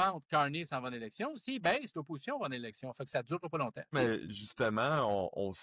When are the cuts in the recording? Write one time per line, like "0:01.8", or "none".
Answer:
0:03.9